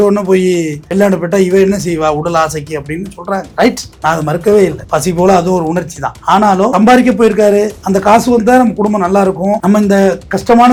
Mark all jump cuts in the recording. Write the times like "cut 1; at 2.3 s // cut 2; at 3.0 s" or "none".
none